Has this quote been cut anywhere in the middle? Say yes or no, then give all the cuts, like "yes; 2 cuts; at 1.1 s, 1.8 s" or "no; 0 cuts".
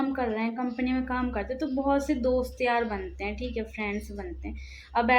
no; 0 cuts